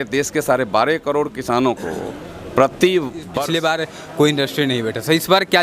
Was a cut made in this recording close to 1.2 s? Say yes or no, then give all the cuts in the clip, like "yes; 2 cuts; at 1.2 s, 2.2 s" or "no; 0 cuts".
no; 1 cut; at 3.2 s